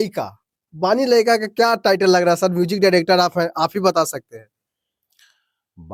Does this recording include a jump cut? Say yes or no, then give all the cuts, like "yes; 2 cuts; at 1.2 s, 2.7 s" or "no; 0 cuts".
no; 0 cuts